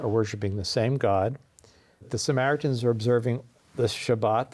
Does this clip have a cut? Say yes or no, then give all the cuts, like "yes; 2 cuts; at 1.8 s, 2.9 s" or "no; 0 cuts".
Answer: yes; 1 cut; at 2.1 s